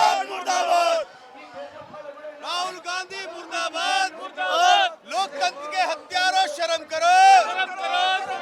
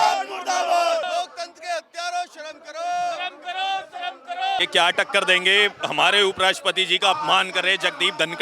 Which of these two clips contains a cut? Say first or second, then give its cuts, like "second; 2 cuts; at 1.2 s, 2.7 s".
second; 2 cuts; at 1.0 s, 4.6 s